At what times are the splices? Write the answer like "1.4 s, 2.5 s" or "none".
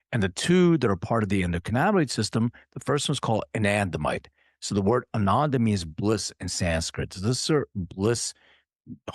none